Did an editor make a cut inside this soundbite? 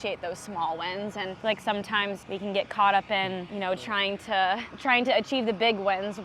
yes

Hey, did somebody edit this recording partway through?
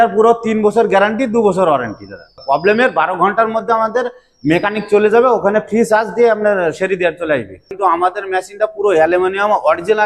yes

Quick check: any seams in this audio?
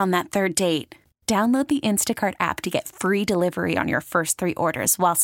no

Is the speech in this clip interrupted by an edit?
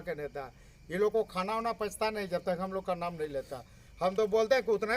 yes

